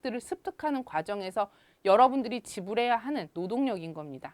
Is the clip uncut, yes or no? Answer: no